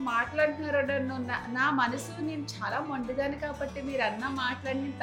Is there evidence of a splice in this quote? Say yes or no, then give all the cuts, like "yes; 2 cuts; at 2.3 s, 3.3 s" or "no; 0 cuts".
no; 0 cuts